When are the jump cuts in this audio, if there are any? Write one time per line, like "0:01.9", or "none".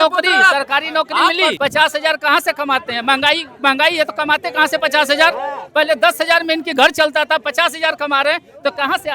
0:01.6